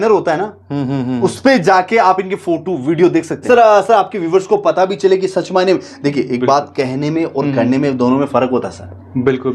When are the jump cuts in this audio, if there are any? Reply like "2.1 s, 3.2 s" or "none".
3.4 s